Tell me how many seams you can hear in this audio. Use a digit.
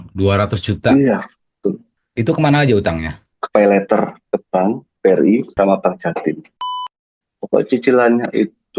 3